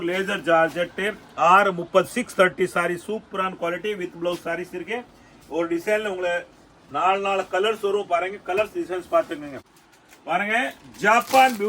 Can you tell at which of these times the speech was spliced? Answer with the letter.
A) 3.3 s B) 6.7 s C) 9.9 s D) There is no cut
C